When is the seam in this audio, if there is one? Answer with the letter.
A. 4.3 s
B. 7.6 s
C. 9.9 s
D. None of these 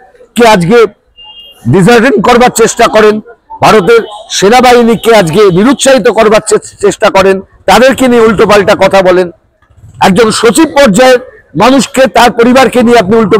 D